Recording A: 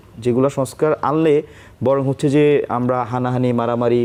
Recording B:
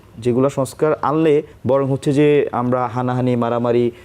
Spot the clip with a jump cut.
B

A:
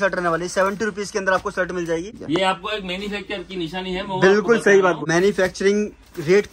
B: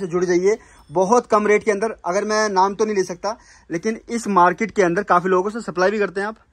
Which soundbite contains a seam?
A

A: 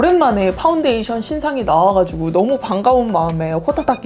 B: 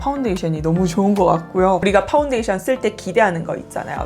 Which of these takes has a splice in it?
B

